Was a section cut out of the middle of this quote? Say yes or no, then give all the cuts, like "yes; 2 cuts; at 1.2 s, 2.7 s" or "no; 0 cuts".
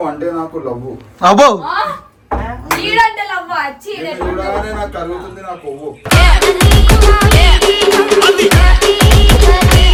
no; 0 cuts